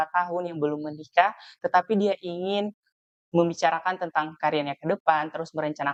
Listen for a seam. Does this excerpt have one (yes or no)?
no